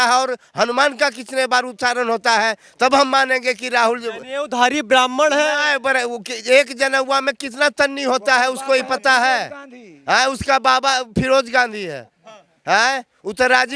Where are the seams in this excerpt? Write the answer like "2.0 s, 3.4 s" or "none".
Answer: none